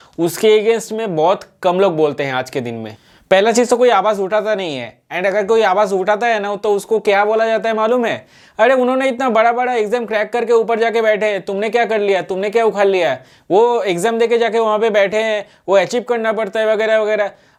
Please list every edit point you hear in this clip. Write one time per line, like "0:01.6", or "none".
none